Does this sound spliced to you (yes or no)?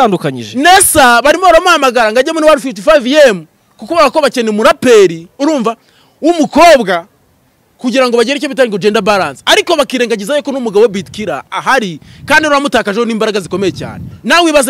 no